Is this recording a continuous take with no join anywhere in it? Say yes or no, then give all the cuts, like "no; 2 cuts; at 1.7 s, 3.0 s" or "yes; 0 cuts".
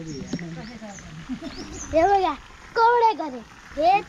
yes; 0 cuts